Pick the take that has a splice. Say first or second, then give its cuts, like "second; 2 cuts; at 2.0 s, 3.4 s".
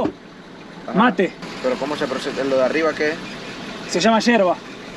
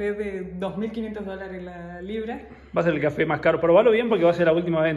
first; 1 cut; at 1.4 s